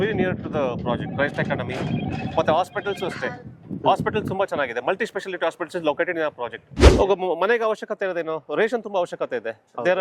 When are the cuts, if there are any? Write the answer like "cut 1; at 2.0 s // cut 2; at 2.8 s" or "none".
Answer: cut 1; at 6.7 s